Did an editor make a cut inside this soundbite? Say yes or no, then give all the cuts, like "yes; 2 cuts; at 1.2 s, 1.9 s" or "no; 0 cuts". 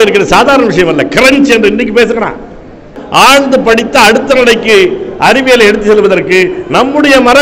yes; 1 cut; at 2.9 s